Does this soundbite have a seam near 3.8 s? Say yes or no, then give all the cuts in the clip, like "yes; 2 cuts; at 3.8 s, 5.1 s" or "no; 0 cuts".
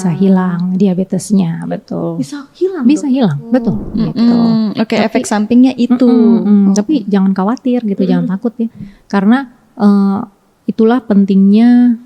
yes; 1 cut; at 3.8 s